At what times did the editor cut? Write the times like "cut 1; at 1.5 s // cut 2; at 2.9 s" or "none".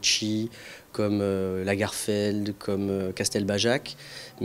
cut 1; at 1.4 s